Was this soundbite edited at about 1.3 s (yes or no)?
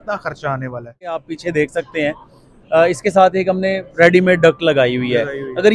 yes